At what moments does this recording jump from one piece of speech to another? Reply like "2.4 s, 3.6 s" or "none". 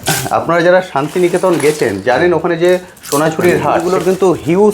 3.8 s